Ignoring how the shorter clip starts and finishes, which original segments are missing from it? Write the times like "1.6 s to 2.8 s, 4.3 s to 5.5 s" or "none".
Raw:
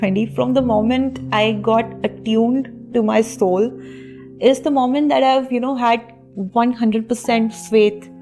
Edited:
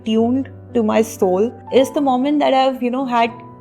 3.8 s to 4.3 s